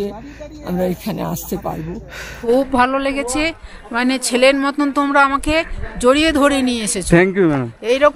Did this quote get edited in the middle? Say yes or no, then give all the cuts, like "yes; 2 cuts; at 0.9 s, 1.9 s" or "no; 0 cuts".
yes; 1 cut; at 2.3 s